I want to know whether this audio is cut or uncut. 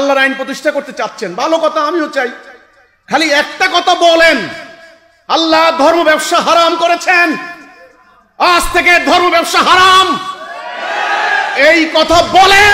uncut